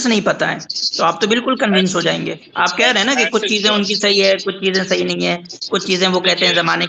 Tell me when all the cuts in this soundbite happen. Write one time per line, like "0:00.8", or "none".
none